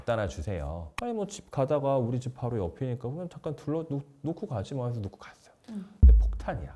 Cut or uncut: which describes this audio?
cut